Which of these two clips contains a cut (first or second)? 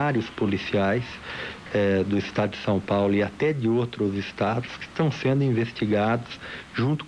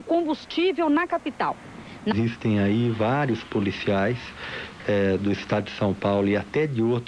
second